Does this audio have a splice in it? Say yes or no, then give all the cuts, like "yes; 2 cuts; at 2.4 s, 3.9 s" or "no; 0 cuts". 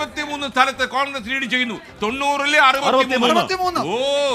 no; 0 cuts